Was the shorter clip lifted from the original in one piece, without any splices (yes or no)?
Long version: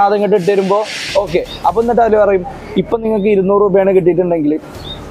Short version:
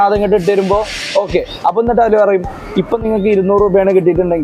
yes